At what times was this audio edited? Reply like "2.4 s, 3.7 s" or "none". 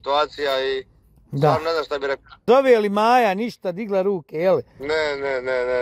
2.4 s

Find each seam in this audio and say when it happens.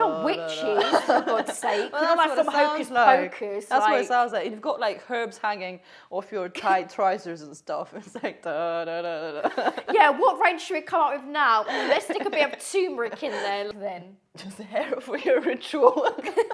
13.7 s

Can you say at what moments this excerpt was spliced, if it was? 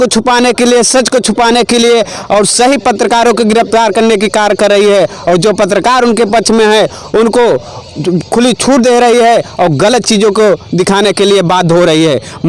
none

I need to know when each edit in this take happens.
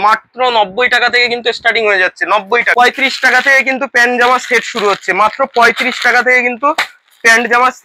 2.7 s

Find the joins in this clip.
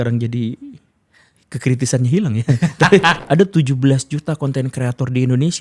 3.2 s

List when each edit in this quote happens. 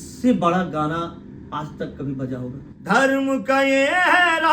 2.6 s

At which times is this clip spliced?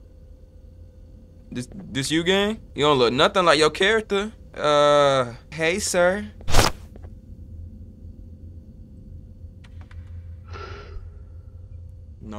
2.7 s, 4.4 s, 5.4 s

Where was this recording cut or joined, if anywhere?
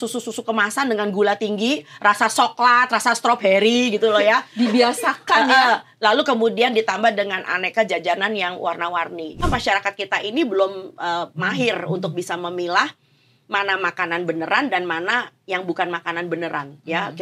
9.4 s

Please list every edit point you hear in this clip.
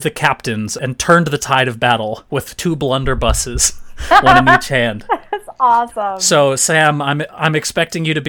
0.8 s, 6.0 s

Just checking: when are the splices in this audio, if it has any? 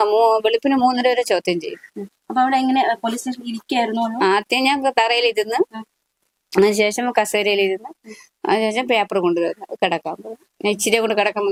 none

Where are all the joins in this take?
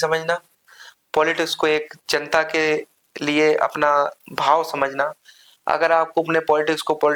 none

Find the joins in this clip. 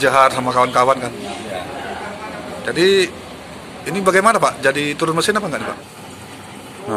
5.8 s

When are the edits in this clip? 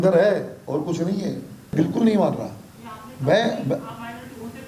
none

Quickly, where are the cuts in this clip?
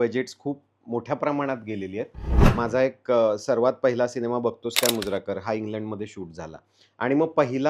2.4 s

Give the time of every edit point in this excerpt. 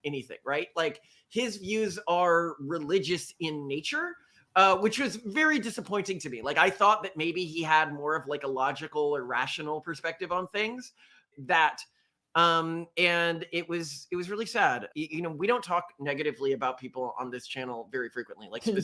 11.2 s, 14.9 s

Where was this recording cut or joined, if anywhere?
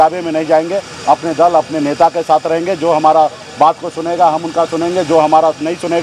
none

